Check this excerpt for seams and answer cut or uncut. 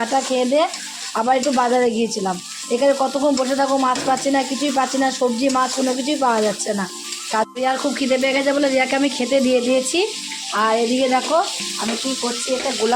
cut